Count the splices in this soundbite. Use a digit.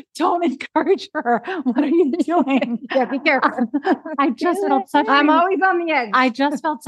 0